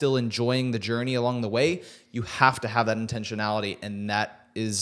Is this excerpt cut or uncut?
uncut